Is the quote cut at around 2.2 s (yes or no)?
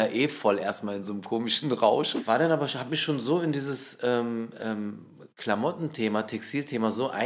yes